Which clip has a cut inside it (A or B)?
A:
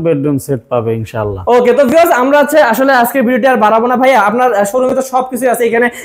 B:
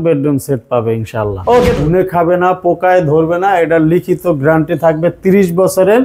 B